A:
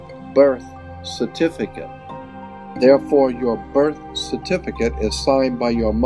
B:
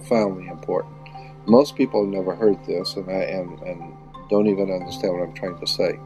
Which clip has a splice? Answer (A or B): A